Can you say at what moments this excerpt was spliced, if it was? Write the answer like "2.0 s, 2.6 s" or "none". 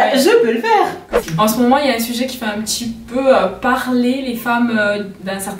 1.1 s

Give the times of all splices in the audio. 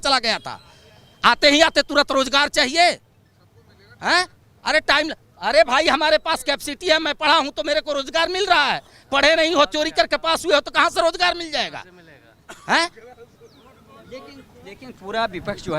none

